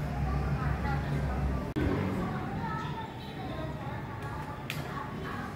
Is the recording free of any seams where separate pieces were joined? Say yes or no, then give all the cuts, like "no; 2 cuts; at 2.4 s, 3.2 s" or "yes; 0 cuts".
no; 1 cut; at 1.8 s